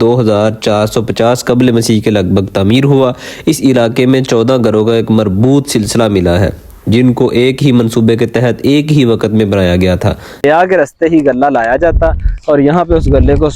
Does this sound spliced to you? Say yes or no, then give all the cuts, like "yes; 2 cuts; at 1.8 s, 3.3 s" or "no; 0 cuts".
yes; 1 cut; at 10.4 s